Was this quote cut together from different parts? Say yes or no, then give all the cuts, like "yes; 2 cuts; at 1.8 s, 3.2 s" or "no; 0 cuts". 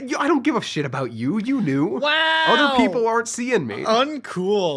no; 0 cuts